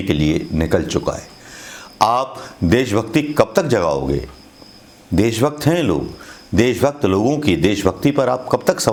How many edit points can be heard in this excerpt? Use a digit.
0